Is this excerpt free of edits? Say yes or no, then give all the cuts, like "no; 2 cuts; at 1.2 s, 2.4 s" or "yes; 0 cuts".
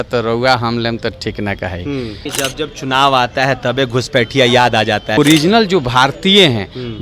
no; 2 cuts; at 2.3 s, 5.2 s